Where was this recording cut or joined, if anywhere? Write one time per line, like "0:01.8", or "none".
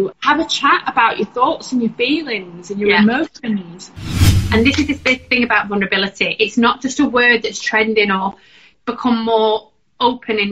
0:04.2
0:08.7